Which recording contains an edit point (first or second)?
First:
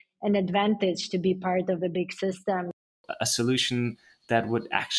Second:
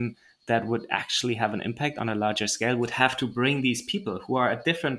first